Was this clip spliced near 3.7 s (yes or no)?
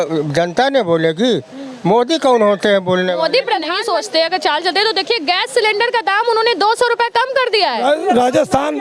yes